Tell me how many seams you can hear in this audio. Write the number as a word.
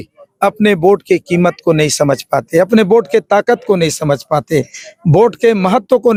zero